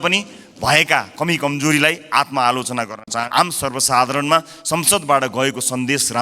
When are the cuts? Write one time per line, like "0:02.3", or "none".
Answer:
0:03.2